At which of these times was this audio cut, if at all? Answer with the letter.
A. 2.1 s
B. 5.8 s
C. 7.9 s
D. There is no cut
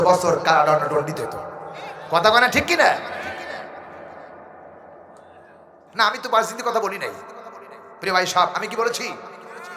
B